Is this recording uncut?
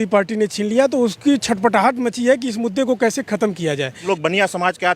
no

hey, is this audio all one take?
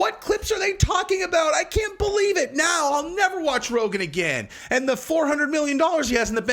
yes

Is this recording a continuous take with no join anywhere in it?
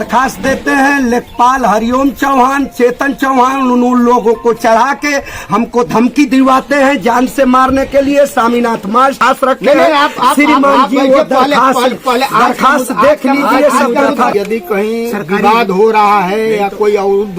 no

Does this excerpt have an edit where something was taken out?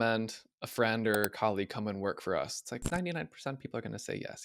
yes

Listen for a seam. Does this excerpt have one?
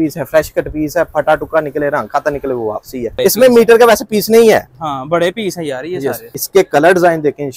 yes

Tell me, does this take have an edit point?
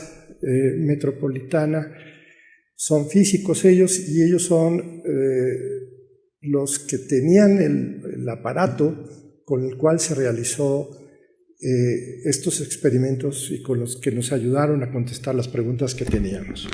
yes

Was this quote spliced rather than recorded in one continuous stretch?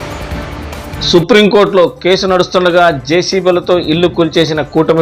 yes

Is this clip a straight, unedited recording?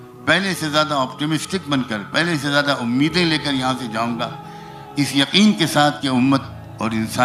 yes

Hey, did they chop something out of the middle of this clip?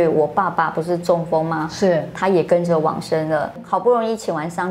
yes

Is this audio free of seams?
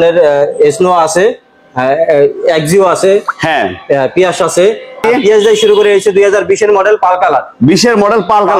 no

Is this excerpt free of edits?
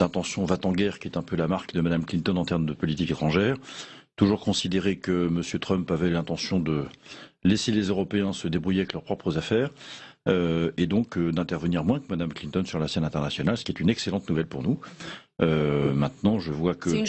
no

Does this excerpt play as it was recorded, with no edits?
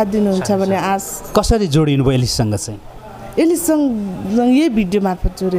yes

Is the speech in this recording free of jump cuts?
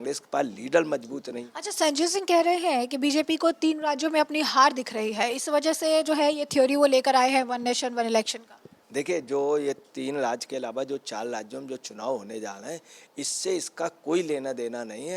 yes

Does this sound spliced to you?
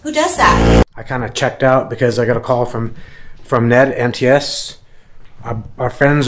yes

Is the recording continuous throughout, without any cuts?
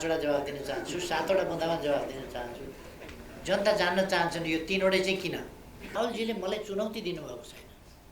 no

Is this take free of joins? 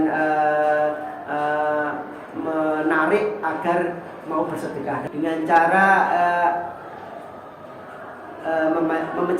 no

